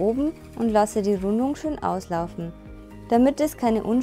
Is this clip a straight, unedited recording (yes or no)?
yes